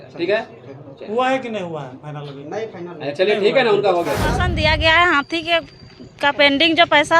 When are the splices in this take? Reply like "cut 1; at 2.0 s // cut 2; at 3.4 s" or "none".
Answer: cut 1; at 4.5 s